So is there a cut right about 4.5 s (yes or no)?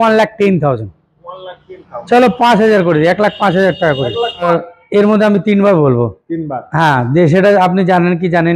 yes